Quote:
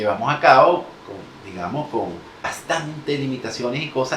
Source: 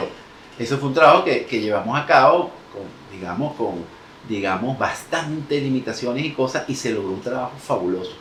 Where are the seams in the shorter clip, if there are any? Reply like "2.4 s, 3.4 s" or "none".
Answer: 2.5 s